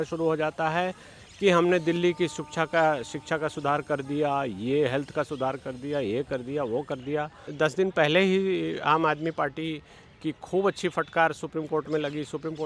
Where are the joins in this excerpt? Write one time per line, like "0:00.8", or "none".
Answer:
0:07.5